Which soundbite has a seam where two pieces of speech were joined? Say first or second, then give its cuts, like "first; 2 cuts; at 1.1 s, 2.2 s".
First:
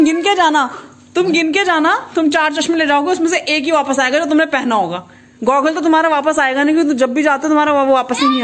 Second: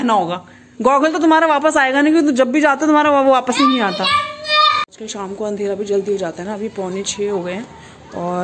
second; 1 cut; at 4.9 s